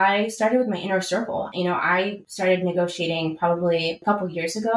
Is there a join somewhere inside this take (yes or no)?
yes